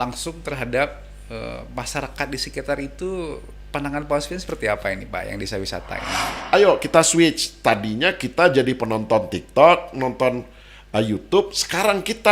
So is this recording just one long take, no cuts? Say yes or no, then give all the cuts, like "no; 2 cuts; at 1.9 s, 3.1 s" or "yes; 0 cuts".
no; 1 cut; at 6.3 s